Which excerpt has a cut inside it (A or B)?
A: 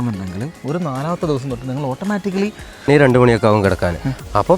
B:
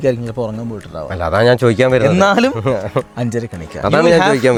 A